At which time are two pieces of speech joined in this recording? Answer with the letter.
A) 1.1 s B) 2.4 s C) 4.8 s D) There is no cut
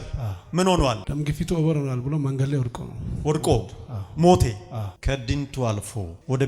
C